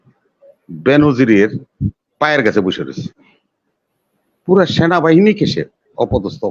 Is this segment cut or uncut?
uncut